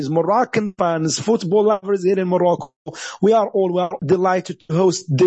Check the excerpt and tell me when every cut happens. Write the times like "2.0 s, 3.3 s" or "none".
4.0 s